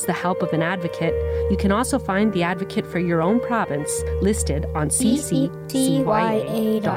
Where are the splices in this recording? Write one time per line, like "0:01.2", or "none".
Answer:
none